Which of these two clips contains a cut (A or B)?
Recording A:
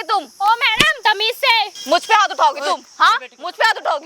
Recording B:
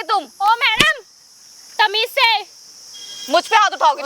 A